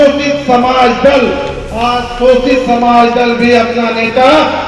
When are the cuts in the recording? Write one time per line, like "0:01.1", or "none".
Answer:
none